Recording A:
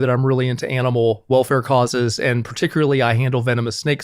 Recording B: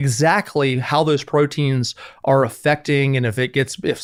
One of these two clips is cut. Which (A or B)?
A